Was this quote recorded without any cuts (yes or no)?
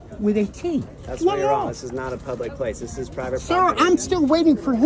yes